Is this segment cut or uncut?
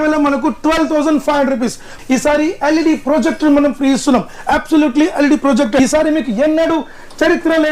cut